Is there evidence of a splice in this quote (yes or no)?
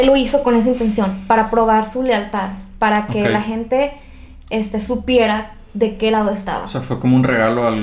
no